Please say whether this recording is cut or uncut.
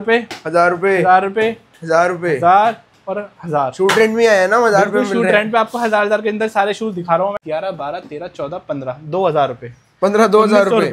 cut